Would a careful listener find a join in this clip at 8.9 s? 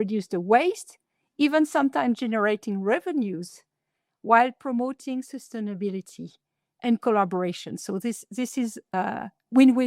yes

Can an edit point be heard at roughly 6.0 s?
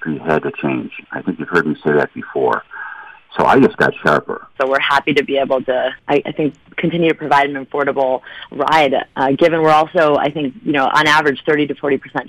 yes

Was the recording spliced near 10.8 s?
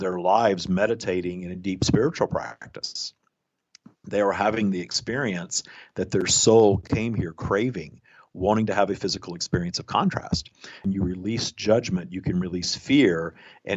yes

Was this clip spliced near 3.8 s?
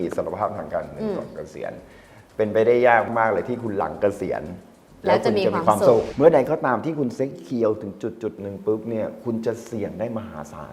no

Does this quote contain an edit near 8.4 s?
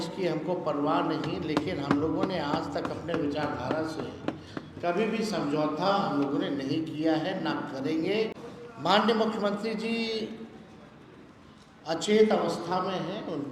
yes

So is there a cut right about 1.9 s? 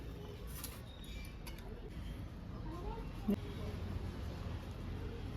yes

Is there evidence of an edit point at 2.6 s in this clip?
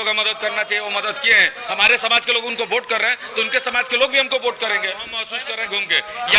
no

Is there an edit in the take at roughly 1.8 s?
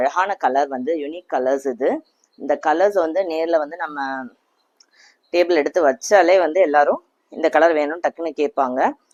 no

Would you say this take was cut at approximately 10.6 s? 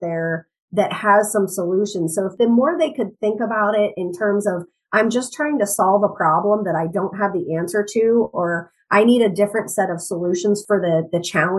yes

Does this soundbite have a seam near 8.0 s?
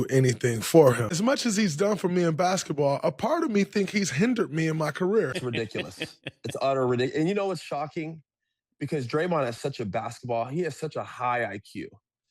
no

